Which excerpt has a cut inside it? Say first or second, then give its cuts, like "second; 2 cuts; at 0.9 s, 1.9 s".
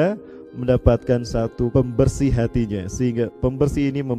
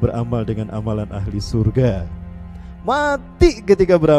first; 1 cut; at 1.7 s